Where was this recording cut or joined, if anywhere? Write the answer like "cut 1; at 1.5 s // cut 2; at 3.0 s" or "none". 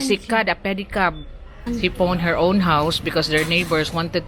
cut 1; at 1.7 s